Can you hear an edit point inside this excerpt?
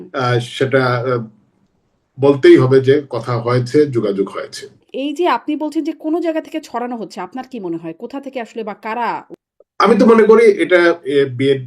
yes; 2 cuts; at 4.8 s, 9.4 s

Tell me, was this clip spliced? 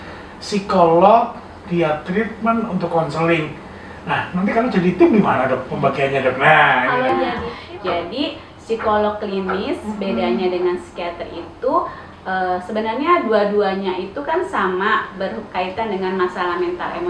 yes; 1 cut; at 7.1 s

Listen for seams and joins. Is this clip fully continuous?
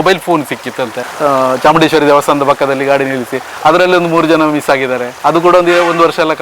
no; 2 cuts; at 1.0 s, 5.1 s

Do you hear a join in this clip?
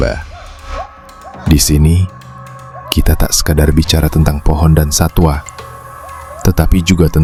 no; 0 cuts

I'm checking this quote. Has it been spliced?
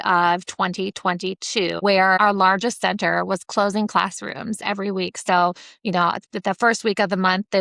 yes; 1 cut; at 2.2 s

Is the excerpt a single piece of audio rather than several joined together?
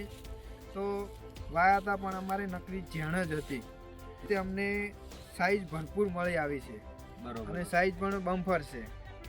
no; 1 cut; at 4.2 s

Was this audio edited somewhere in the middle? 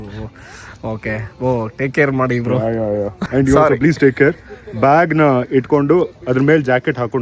yes; 1 cut; at 3.2 s

